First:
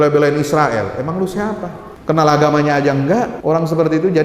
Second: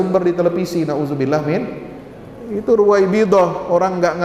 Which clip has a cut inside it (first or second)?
first